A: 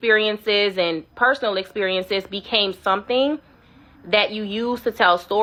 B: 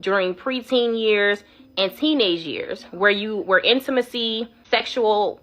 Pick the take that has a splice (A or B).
B